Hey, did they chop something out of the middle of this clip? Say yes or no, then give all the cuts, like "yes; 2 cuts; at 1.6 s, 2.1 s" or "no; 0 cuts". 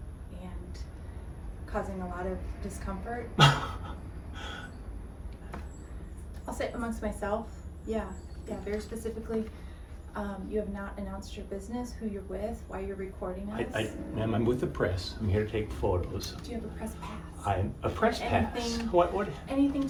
no; 0 cuts